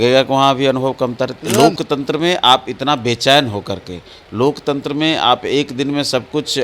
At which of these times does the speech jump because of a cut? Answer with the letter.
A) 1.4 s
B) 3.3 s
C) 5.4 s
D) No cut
A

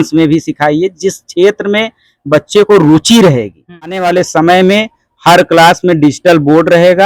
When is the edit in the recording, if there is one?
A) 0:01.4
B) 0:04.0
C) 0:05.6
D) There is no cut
B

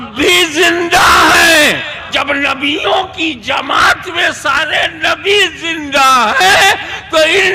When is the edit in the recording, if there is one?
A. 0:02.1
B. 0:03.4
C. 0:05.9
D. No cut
A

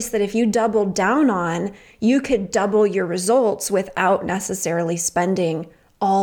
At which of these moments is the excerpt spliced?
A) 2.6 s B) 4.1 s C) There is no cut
C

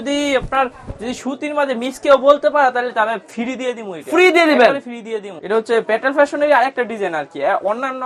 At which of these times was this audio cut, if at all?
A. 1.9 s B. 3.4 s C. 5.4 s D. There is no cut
C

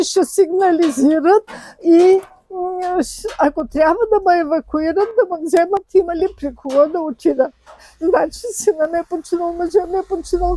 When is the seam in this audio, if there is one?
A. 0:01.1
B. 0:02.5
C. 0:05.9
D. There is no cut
D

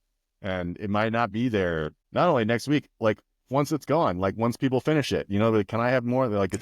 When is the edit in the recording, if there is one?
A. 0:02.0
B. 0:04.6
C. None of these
A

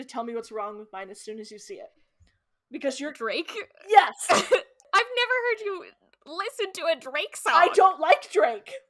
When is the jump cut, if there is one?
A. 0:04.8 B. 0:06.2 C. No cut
A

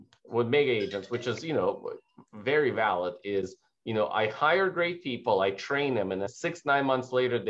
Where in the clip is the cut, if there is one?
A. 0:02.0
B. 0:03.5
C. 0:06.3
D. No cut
C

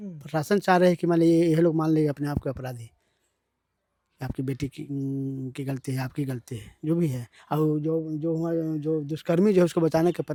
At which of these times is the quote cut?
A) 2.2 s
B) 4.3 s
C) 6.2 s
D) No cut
D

